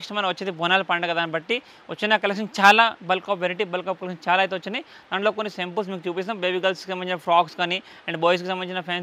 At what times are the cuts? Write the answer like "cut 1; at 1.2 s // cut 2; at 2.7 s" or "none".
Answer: none